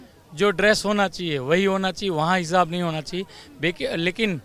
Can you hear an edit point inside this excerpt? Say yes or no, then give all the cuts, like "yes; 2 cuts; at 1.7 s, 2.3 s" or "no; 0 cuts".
no; 0 cuts